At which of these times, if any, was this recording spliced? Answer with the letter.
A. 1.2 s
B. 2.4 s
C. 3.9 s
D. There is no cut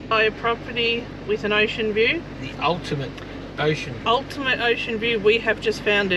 D